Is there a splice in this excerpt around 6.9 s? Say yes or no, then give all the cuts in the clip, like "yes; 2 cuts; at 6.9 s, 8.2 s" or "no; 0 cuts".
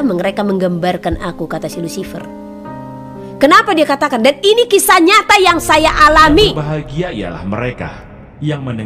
yes; 1 cut; at 6.9 s